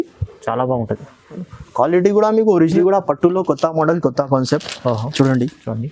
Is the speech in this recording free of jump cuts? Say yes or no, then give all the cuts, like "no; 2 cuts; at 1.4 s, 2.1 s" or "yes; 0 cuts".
no; 1 cut; at 2.8 s